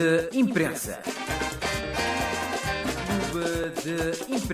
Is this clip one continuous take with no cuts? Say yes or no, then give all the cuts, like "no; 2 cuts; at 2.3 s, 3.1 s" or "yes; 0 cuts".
yes; 0 cuts